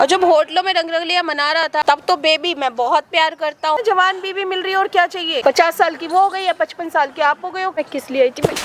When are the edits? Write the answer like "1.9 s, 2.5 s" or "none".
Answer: 1.8 s, 3.8 s, 5.4 s, 7.8 s